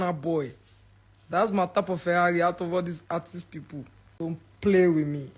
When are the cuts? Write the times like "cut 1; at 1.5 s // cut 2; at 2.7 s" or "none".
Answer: cut 1; at 4.0 s